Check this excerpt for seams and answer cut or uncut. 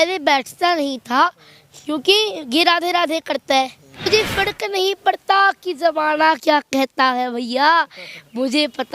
cut